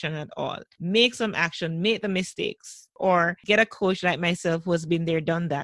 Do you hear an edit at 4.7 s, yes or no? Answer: no